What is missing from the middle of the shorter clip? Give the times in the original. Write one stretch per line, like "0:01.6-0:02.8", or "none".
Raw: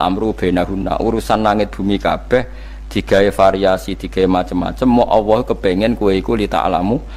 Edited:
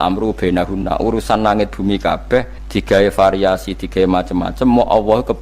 0:02.6-0:02.8